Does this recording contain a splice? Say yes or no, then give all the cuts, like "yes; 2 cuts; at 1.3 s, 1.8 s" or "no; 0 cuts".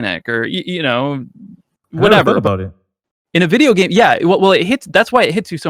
no; 0 cuts